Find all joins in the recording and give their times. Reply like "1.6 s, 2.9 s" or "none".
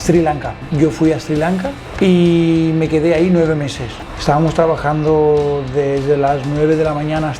4.0 s

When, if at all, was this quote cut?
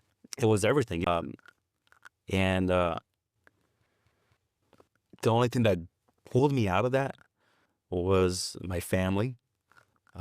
1.0 s

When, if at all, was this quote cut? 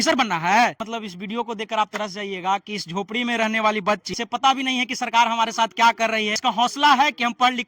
0.8 s, 4.1 s, 6.4 s

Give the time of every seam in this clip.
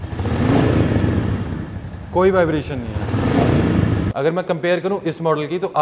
4.1 s

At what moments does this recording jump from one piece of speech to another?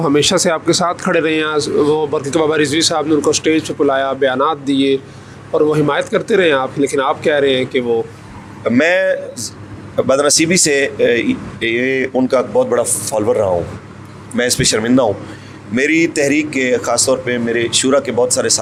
none

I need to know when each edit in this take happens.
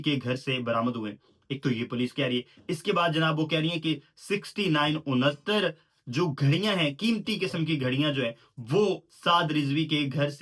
none

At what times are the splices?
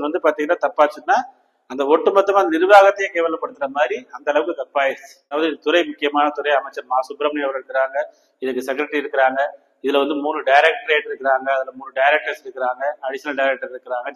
5.4 s

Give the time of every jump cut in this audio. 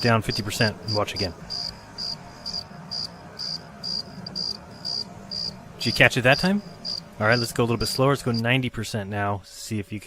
9.2 s

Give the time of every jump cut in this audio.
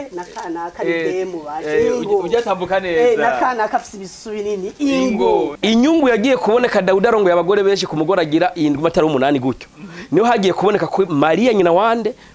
5.5 s

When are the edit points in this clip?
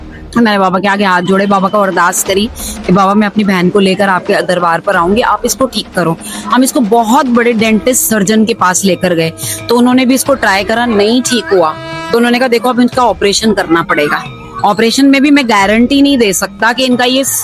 none

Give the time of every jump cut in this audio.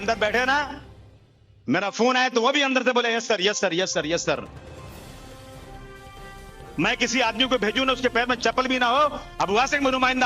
none

